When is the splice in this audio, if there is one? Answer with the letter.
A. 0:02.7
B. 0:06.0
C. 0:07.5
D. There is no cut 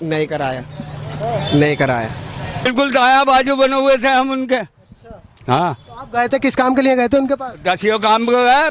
A